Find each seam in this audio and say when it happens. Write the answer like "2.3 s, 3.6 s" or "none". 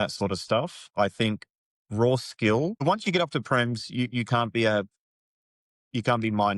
2.8 s

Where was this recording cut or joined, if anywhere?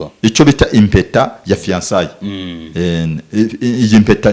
none

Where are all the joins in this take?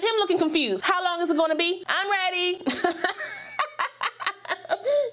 0.8 s, 1.9 s

